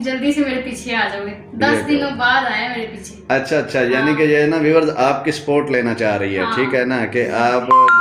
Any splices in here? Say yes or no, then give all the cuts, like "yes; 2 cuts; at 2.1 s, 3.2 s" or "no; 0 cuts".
no; 0 cuts